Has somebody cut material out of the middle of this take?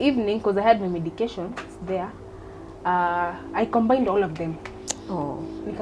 no; 0 cuts

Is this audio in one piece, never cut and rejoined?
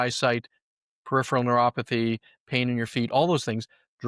yes; 0 cuts

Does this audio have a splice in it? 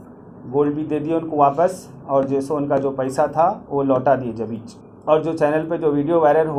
no; 0 cuts

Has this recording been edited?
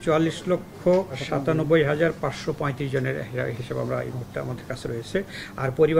yes; 1 cut; at 1.2 s

